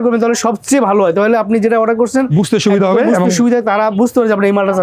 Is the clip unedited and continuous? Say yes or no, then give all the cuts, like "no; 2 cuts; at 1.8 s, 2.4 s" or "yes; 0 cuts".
yes; 0 cuts